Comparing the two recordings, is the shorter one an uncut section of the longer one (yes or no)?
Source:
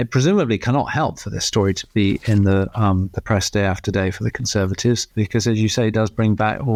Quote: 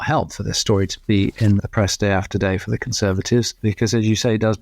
no